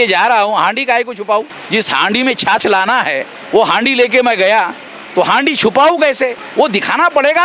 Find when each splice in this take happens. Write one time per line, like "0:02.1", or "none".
none